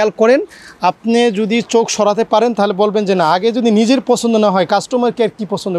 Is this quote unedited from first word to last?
yes; 0 cuts

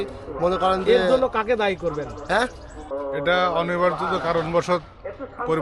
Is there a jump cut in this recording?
yes; 1 cut; at 2.9 s

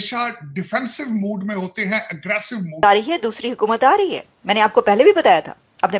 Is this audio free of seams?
no; 1 cut; at 2.8 s

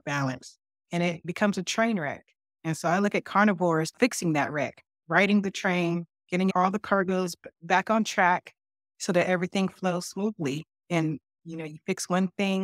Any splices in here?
yes; 4 cuts; at 1.2 s, 3.9 s, 6.5 s, 7.5 s

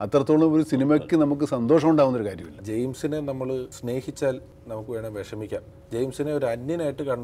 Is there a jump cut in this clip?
yes; 4 cuts; at 2.6 s, 3.7 s, 4.5 s, 5.7 s

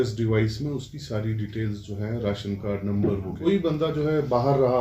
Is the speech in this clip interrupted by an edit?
yes; 1 cut; at 3.4 s

